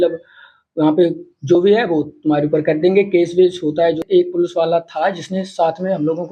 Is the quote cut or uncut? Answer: cut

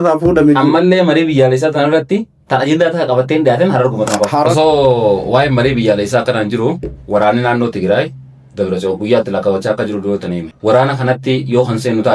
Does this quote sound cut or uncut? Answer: cut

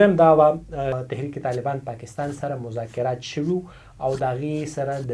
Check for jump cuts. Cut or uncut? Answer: cut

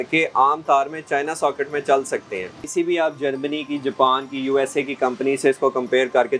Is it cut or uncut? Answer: cut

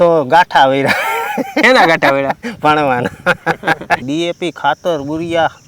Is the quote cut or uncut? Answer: cut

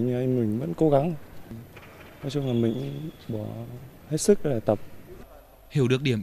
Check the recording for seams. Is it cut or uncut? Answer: uncut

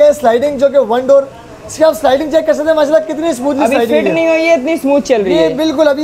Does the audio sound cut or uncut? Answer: uncut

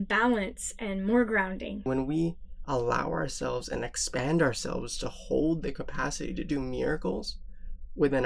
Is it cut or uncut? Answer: cut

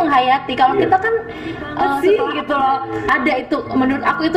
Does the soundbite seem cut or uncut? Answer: cut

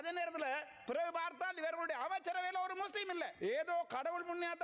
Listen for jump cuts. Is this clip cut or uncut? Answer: cut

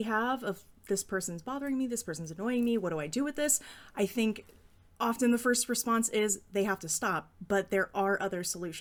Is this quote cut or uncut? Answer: uncut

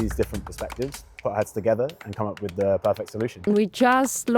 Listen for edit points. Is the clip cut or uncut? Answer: cut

